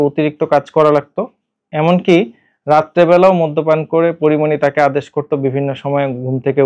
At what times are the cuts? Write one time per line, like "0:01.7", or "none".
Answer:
none